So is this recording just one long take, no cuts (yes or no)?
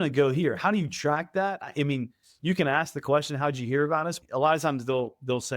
no